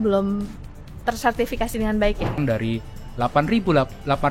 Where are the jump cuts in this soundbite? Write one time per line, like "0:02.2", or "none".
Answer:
0:02.4

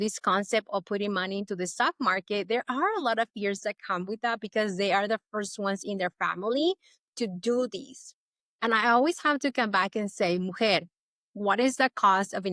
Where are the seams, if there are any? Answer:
none

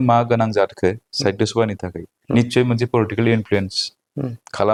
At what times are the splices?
none

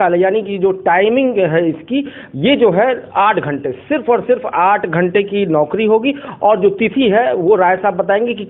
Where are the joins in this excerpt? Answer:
none

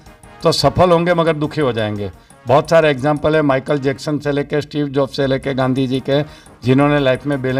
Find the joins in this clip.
none

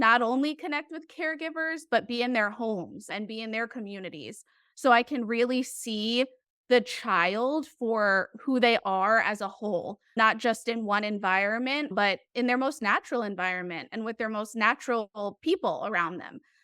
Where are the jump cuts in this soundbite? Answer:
0:11.9

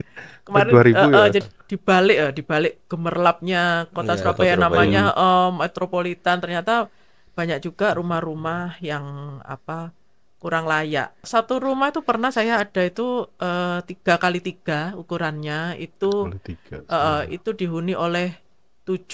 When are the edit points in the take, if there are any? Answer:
0:01.5
0:11.3

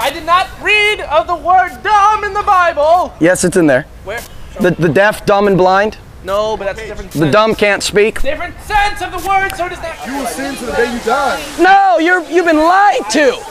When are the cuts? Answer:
0:10.0

